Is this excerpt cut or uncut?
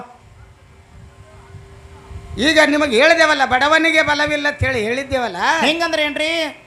uncut